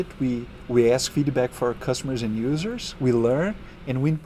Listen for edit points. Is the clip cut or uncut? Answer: uncut